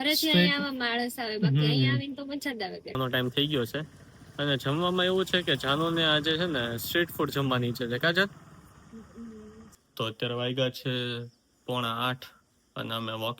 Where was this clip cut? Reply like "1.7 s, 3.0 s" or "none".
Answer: 3.0 s, 9.8 s